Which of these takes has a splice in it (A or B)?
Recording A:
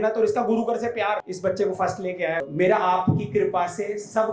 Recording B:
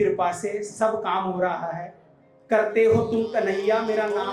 A